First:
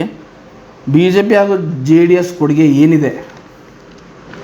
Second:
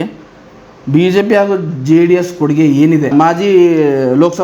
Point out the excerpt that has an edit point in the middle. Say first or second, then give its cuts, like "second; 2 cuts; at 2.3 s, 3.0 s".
second; 1 cut; at 3.1 s